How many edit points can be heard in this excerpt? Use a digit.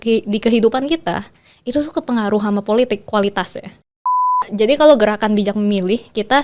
1